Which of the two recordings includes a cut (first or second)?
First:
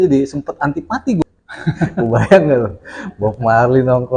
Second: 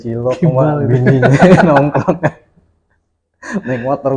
first